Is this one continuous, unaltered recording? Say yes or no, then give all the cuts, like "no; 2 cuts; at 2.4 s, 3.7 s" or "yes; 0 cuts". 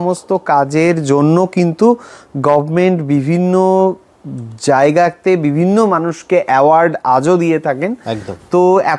yes; 0 cuts